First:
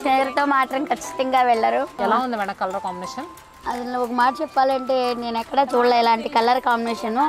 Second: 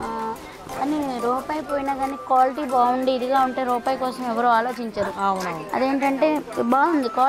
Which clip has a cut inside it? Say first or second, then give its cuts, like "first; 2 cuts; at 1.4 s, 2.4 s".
first; 1 cut; at 1.9 s